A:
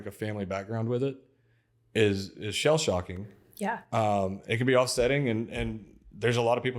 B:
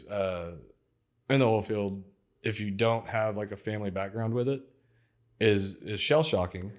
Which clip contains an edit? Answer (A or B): A